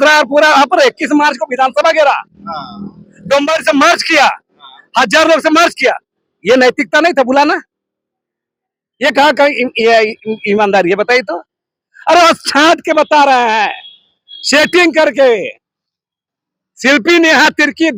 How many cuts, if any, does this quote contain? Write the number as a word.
zero